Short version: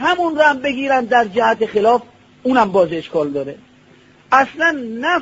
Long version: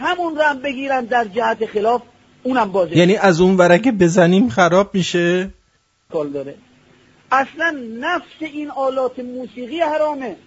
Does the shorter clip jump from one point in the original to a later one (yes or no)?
yes